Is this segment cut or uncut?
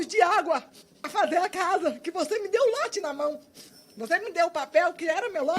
cut